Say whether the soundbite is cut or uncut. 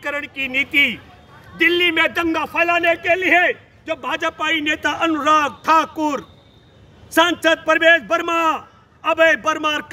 uncut